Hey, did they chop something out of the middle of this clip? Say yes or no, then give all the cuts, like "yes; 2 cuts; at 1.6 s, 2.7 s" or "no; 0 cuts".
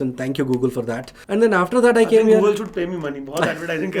no; 0 cuts